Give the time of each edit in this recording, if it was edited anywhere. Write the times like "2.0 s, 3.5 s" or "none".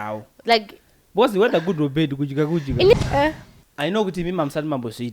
2.9 s